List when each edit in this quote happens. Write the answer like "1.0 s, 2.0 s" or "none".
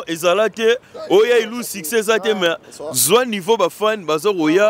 none